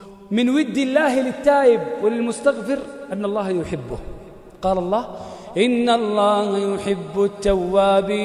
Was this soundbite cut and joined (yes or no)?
no